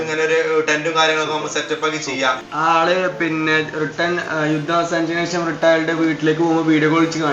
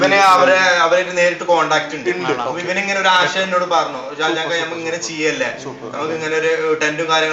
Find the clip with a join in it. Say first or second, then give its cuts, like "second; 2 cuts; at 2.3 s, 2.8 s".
first; 1 cut; at 2.4 s